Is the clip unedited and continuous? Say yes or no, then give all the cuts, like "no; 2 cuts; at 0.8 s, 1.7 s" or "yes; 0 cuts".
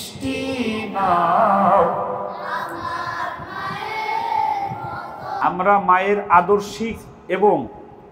no; 1 cut; at 5.3 s